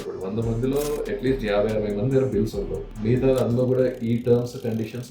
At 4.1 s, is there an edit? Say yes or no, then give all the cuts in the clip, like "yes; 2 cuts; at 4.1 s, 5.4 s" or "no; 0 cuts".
no; 1 cut; at 2.8 s